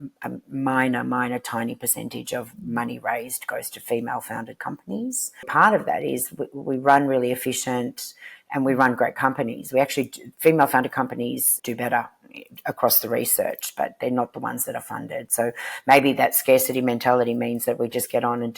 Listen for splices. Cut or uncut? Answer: cut